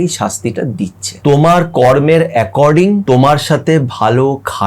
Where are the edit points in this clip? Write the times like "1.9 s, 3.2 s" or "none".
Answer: 1.0 s, 3.0 s